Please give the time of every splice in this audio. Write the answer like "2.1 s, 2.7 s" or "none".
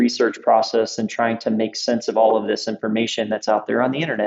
none